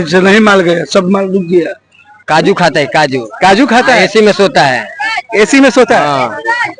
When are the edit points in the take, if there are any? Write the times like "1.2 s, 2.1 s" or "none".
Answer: 2.3 s